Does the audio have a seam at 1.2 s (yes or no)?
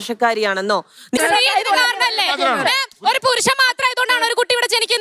yes